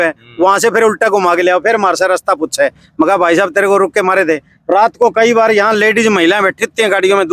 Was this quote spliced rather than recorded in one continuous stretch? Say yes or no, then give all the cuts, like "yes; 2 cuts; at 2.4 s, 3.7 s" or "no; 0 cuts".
no; 0 cuts